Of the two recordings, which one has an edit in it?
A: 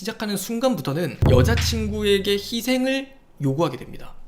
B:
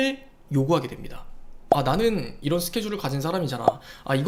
A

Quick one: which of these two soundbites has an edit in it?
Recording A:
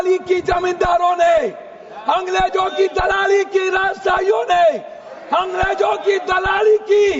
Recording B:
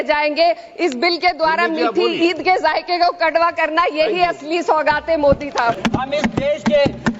B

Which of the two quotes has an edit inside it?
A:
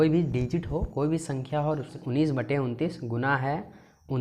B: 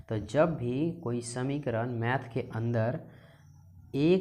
A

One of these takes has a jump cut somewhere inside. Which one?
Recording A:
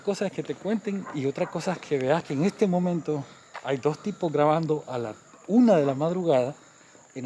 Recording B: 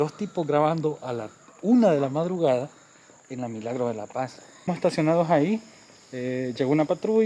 B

